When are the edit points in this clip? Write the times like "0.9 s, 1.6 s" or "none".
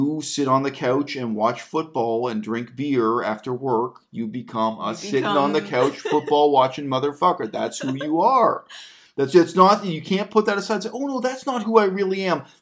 none